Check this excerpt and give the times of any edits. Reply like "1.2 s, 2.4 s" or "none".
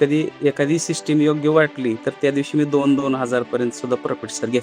none